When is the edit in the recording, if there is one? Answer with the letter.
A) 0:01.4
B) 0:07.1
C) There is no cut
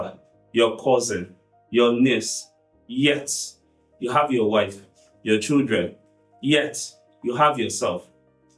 C